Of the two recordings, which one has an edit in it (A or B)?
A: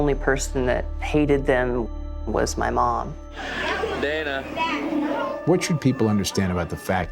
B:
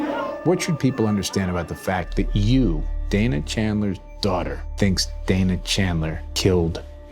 B